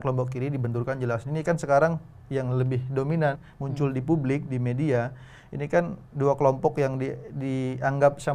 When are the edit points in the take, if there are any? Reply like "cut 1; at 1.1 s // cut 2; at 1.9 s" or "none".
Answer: none